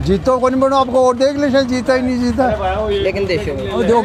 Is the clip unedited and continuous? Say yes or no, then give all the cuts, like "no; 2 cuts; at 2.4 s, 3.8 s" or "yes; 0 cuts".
yes; 0 cuts